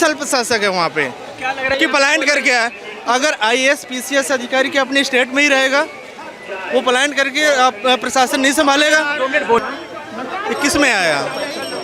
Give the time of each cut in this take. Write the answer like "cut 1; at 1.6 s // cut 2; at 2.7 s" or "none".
cut 1; at 1.7 s // cut 2; at 9.6 s